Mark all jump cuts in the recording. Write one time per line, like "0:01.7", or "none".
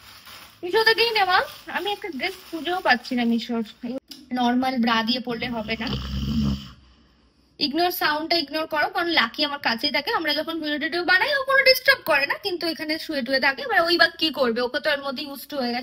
0:04.0

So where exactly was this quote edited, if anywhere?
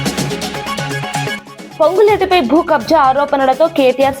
0:01.5

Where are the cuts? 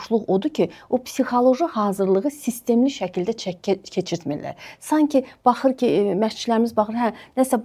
none

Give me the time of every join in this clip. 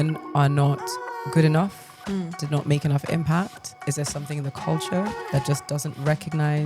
0:02.4
0:03.8

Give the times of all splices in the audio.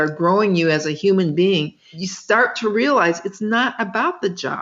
0:01.8

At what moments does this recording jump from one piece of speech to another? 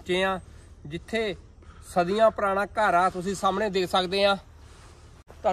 none

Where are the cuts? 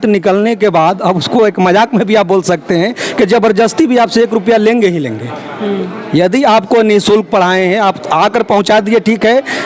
none

